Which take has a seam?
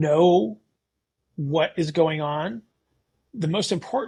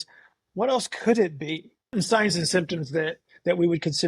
second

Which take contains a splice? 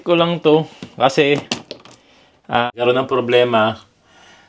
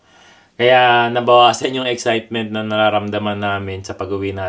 first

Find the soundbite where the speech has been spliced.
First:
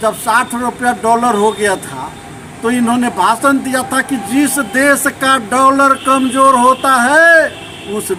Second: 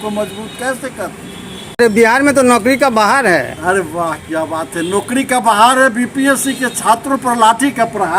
second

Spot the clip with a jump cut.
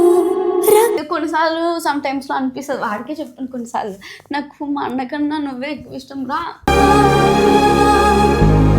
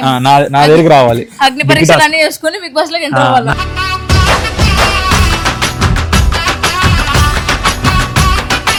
first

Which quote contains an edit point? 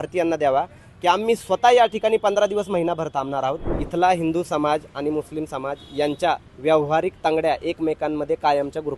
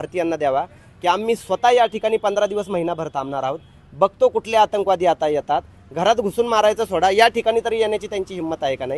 first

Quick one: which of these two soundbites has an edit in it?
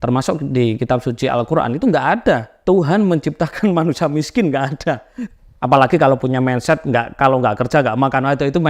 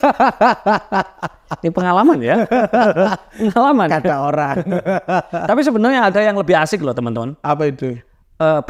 first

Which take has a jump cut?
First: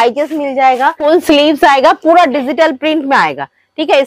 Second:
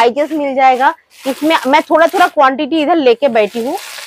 first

